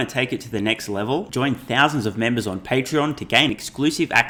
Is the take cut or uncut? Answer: uncut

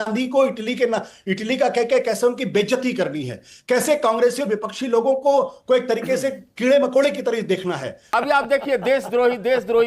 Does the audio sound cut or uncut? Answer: cut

